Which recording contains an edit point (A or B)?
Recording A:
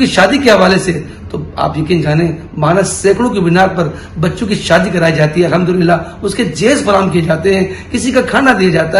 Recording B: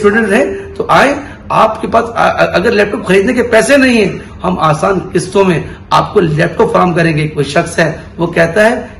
B